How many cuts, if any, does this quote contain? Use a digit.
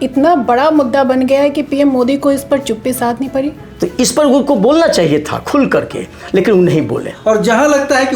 2